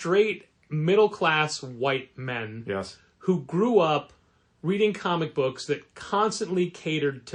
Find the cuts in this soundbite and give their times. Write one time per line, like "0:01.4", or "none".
none